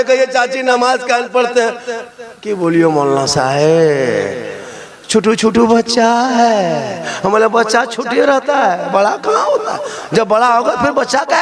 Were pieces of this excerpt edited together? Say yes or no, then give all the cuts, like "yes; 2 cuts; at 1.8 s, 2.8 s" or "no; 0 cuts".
no; 0 cuts